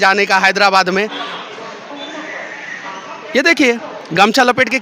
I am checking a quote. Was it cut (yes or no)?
no